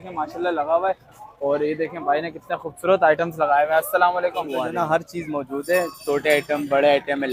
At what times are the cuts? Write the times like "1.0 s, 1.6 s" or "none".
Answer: 4.7 s

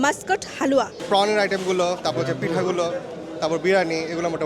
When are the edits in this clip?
1.0 s

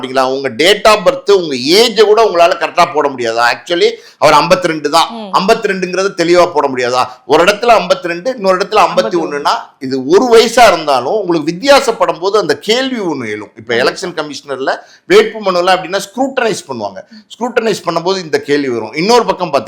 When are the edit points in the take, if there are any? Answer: none

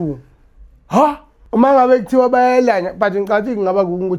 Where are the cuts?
1.3 s

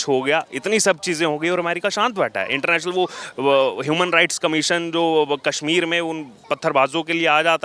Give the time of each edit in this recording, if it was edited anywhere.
none

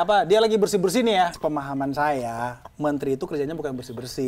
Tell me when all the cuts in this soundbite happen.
1.3 s

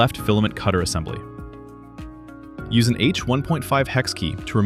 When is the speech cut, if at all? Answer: none

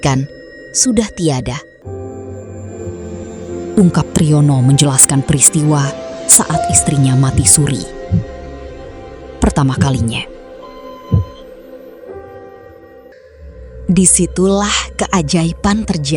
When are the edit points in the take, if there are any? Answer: 1.7 s, 13.1 s

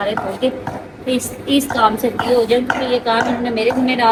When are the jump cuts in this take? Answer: none

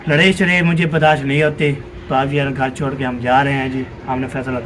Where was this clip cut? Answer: none

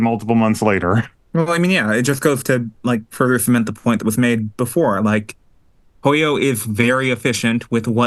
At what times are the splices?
none

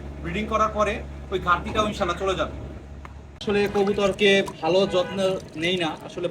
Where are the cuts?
3.4 s

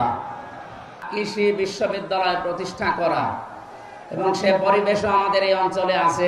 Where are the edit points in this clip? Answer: 1.1 s

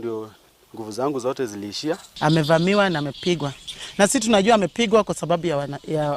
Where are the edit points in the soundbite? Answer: 2.1 s

